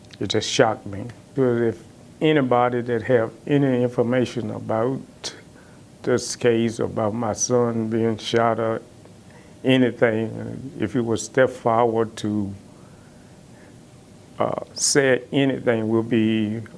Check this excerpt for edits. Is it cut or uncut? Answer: cut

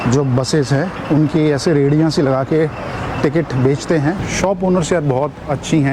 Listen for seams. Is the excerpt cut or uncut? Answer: cut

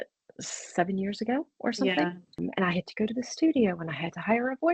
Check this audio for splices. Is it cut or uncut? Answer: cut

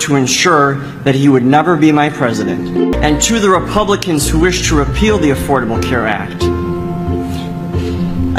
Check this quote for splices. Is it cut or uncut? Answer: cut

